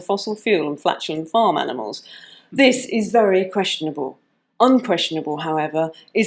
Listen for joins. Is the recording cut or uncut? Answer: uncut